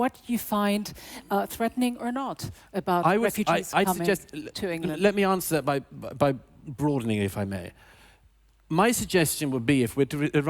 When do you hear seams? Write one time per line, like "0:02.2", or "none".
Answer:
0:05.4